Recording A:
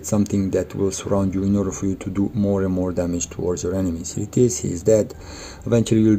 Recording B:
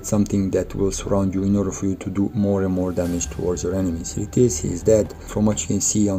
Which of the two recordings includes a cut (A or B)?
B